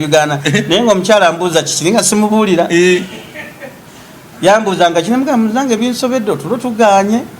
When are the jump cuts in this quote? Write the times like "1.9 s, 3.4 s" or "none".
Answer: none